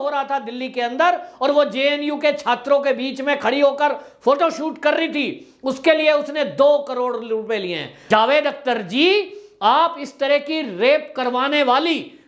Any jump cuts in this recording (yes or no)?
yes